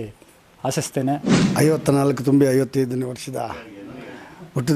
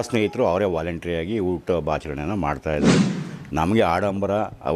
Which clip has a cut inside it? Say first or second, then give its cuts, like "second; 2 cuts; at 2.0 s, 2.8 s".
first; 1 cut; at 1.4 s